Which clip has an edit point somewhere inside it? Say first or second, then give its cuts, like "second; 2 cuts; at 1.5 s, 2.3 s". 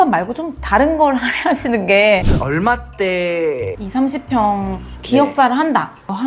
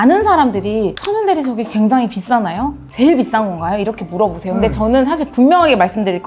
first; 1 cut; at 2.2 s